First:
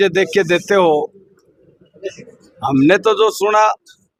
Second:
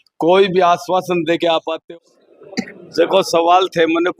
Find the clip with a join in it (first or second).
second